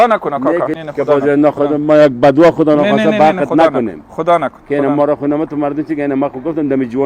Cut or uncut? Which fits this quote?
uncut